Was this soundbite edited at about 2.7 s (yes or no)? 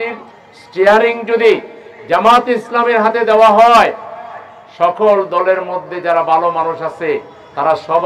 no